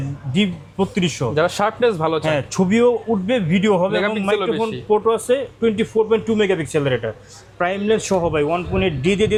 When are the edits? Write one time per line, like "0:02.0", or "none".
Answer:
none